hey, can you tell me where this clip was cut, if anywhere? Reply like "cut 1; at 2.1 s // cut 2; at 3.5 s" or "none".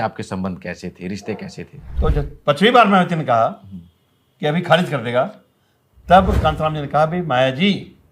cut 1; at 1.8 s